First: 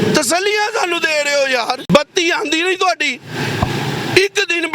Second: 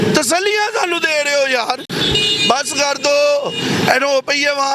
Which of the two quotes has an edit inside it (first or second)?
first